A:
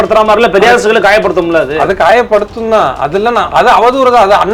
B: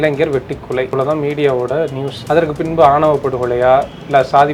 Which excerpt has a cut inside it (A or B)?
B